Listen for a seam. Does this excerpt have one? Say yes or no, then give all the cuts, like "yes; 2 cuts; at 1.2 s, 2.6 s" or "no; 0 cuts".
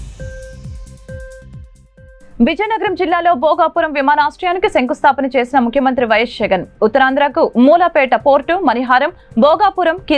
yes; 1 cut; at 1.0 s